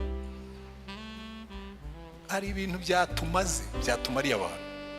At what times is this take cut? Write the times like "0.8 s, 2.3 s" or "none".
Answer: 2.2 s